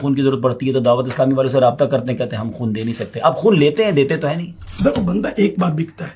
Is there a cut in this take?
yes; 1 cut; at 4.6 s

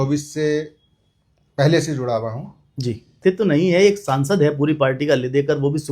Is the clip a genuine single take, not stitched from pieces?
no; 1 cut; at 3.2 s

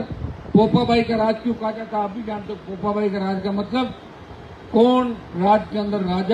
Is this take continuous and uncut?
yes; 0 cuts

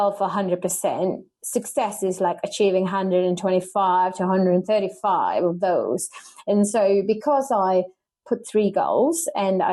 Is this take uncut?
yes; 0 cuts

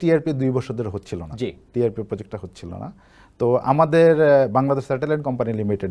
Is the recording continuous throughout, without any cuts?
yes; 0 cuts

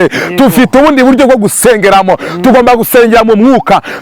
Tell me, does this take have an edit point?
no; 0 cuts

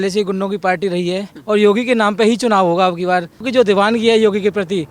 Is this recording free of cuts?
no; 2 cuts; at 1.3 s, 3.5 s

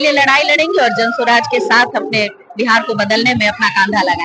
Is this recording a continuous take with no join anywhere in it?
yes; 0 cuts

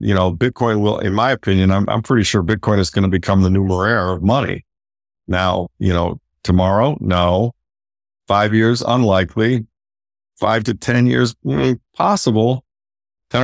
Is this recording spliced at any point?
no; 0 cuts

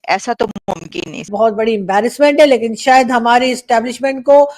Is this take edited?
yes; 1 cut; at 1.3 s

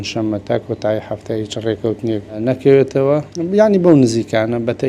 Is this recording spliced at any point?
yes; 2 cuts; at 2.4 s, 3.3 s

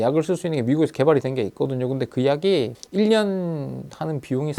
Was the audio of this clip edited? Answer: no; 0 cuts

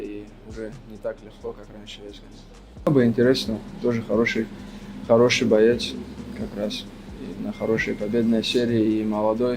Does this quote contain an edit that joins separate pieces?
yes; 1 cut; at 2.9 s

